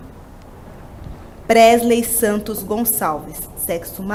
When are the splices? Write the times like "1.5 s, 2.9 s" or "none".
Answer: none